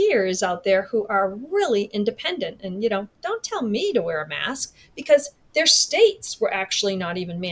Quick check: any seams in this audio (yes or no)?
no